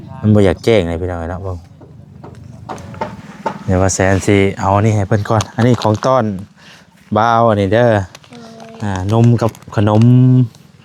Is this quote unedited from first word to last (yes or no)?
no